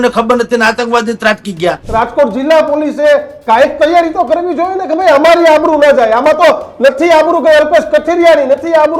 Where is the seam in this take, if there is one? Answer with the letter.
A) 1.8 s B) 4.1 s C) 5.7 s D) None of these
A